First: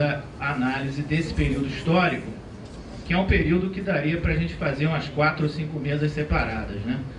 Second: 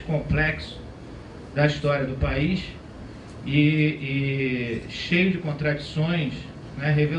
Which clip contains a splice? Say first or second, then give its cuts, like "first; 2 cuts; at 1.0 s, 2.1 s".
first; 1 cut; at 1.9 s